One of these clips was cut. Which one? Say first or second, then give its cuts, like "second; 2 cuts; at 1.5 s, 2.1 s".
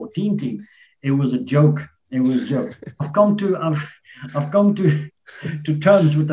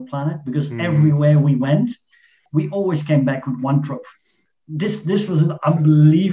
second; 2 cuts; at 2.4 s, 4.4 s